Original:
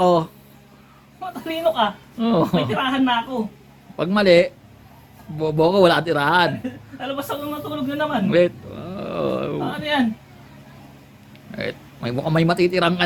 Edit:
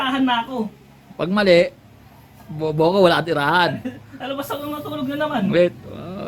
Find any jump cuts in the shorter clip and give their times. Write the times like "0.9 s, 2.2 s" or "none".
none